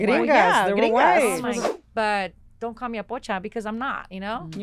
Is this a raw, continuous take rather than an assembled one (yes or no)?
no